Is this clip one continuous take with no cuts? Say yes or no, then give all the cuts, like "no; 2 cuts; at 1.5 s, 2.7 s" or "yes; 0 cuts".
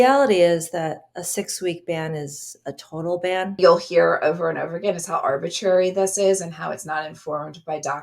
no; 1 cut; at 3.6 s